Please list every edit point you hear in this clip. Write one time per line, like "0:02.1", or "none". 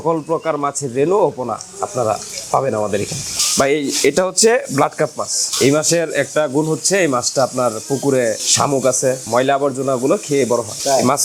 none